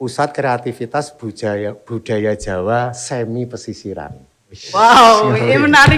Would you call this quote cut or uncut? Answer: uncut